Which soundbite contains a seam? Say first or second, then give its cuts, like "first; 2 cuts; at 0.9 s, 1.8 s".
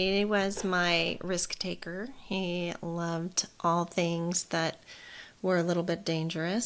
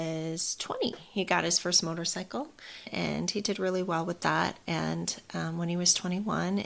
second; 1 cut; at 2.9 s